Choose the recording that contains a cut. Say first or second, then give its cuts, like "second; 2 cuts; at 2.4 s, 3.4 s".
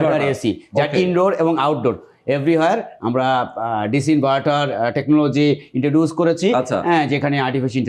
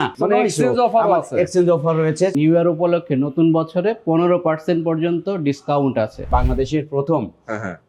second; 2 cuts; at 2.3 s, 6.3 s